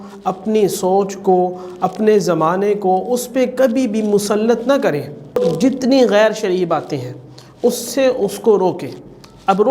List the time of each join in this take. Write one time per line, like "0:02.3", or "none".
0:05.4